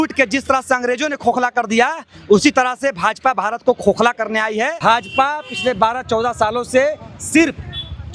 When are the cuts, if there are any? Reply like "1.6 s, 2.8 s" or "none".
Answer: 4.7 s